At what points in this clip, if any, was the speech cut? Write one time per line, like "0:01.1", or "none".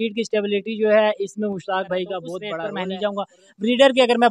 0:02.7